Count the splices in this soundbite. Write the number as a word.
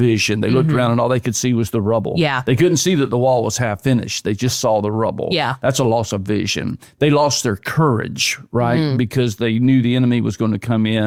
zero